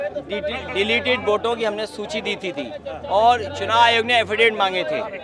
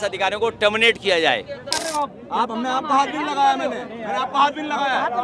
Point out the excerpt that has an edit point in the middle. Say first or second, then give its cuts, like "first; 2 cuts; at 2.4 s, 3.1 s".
second; 1 cut; at 1.8 s